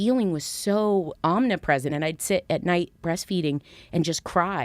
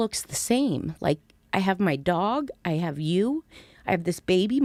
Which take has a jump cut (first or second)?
first